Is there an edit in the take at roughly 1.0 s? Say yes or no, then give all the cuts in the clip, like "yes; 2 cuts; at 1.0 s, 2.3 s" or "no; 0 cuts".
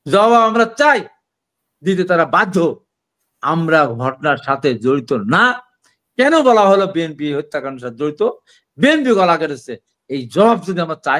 no; 0 cuts